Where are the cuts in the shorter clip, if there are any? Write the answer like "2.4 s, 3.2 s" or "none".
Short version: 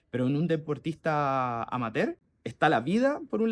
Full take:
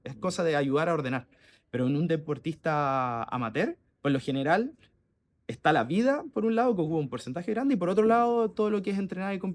2.3 s